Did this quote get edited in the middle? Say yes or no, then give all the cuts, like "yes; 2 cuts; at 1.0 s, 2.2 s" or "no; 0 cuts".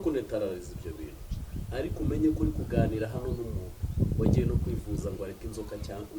no; 0 cuts